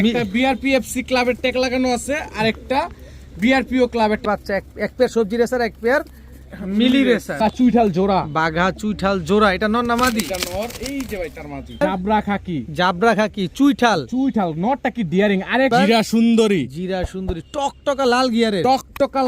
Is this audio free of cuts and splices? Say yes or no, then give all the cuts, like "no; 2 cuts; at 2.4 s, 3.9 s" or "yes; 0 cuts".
no; 4 cuts; at 4.2 s, 7.4 s, 11.8 s, 15.7 s